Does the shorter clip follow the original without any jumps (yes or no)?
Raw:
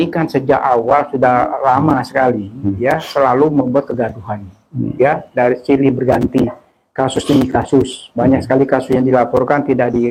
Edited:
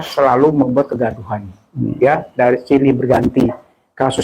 yes